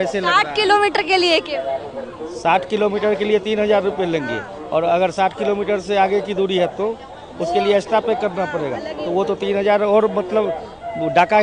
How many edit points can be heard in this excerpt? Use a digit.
0